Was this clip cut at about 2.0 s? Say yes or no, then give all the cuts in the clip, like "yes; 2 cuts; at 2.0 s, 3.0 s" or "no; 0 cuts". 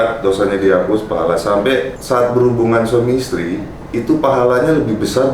yes; 1 cut; at 2.0 s